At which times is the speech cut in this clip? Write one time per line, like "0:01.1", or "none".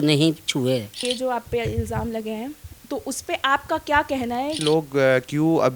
0:01.0
0:04.6